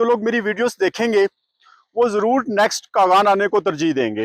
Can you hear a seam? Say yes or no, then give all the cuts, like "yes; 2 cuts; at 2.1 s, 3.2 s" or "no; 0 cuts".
no; 0 cuts